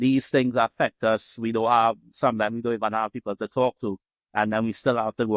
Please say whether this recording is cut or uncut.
uncut